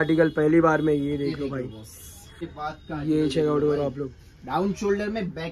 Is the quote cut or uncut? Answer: cut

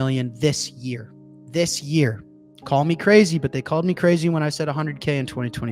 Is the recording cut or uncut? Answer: uncut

